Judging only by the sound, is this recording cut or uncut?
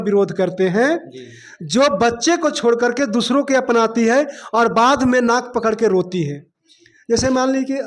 uncut